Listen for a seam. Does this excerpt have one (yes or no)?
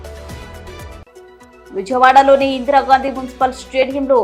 yes